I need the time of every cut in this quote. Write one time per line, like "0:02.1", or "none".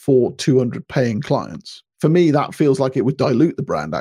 0:01.8